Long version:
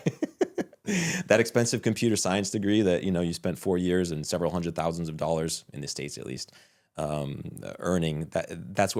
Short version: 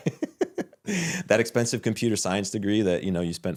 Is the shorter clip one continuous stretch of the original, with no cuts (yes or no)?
yes